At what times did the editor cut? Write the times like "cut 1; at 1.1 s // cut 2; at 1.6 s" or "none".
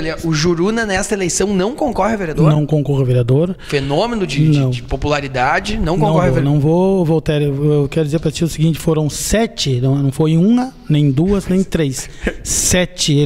none